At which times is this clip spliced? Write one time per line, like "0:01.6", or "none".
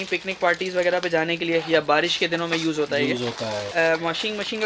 0:03.7